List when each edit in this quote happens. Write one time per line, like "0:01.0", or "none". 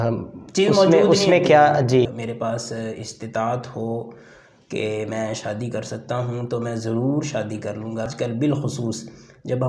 0:02.1
0:08.1